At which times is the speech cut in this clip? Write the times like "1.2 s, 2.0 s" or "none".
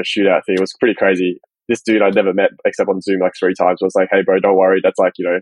1.4 s